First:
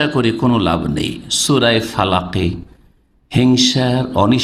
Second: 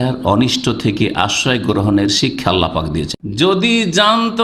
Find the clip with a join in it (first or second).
second